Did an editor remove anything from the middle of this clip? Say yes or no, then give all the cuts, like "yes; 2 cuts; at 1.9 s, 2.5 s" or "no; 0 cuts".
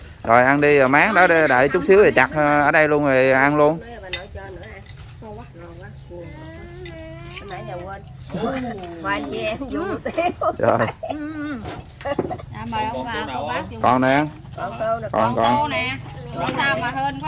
no; 0 cuts